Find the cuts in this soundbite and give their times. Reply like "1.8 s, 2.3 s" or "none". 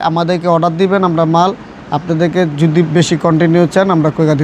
none